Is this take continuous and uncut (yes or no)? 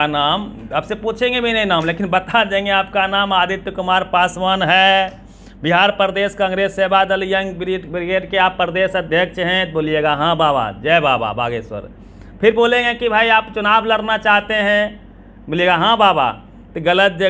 yes